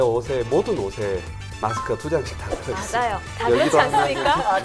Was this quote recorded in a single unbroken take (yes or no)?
yes